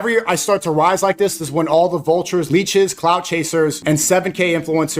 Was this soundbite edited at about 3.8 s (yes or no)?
yes